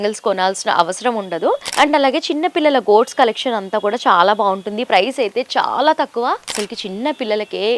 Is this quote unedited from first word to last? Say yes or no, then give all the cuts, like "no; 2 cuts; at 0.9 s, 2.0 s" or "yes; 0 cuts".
no; 2 cuts; at 1.7 s, 6.5 s